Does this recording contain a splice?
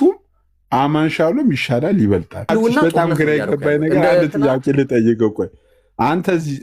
yes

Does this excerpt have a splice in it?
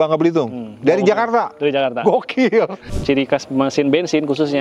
yes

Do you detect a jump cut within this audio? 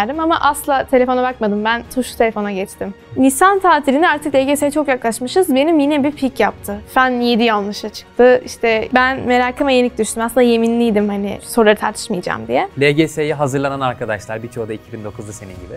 yes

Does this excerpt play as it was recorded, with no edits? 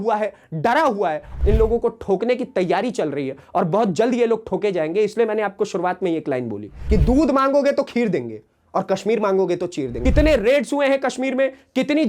no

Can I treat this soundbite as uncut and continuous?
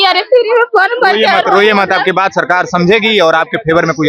yes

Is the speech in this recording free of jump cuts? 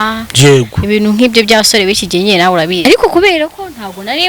no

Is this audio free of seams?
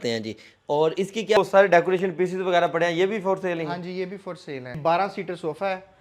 no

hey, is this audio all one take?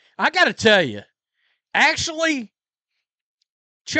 yes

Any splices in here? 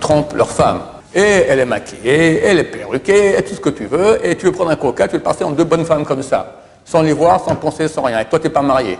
yes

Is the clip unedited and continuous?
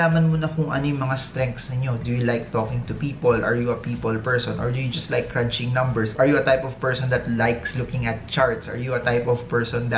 yes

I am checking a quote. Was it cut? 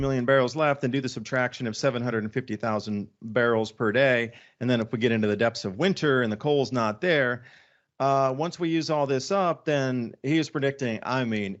no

